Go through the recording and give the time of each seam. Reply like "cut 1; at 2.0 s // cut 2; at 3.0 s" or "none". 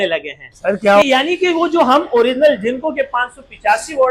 cut 1; at 1.0 s